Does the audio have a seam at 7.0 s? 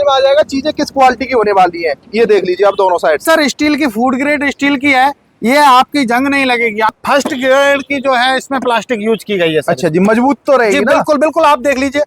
yes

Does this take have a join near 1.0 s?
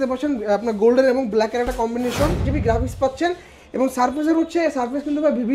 no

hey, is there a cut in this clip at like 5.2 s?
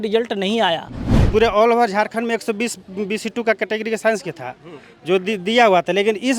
no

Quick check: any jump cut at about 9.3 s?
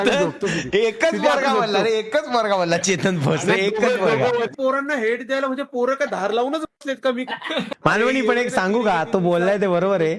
no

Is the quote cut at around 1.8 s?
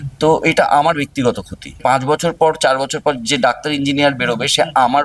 yes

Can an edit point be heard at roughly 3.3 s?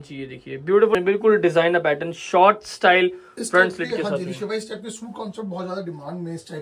no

